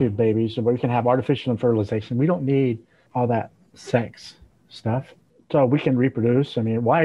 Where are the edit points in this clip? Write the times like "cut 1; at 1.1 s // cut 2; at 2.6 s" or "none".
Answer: cut 1; at 2.9 s